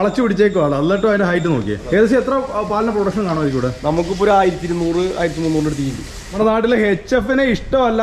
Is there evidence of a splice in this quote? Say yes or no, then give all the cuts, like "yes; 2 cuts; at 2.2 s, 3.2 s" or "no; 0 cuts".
yes; 2 cuts; at 1.8 s, 6.4 s